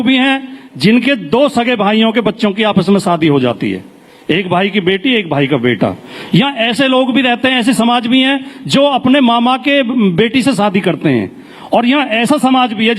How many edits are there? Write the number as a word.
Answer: zero